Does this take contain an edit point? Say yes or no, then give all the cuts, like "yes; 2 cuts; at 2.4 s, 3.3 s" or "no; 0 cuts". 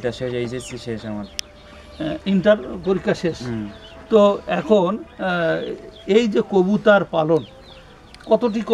no; 0 cuts